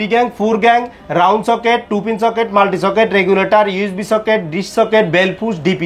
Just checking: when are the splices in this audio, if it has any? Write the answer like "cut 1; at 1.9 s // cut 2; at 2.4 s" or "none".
none